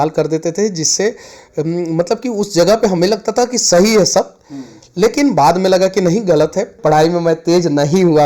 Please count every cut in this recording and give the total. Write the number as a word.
one